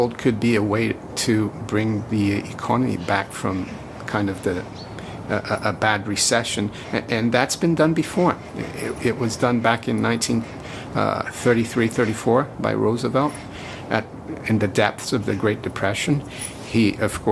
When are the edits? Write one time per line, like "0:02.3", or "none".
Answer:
none